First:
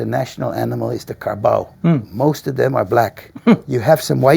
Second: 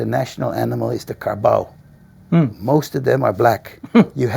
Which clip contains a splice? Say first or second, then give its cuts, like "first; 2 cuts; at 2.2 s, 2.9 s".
first; 1 cut; at 1.7 s